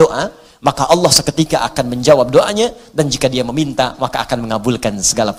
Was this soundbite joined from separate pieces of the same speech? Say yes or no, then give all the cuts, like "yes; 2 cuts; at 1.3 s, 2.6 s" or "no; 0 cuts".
no; 0 cuts